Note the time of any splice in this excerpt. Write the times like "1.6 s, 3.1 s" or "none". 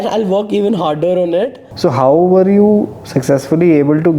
1.6 s